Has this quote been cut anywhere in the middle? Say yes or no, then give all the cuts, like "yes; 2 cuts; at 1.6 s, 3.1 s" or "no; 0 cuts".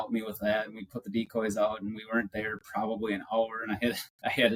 no; 0 cuts